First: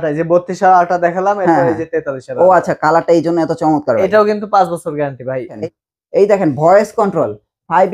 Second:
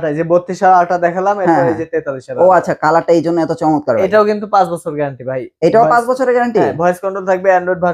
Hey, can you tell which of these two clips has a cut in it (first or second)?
first